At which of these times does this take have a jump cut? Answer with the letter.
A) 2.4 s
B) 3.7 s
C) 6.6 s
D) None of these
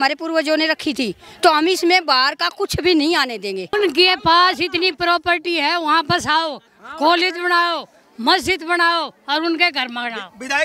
B